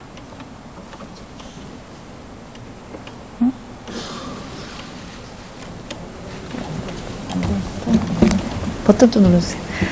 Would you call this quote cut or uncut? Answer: cut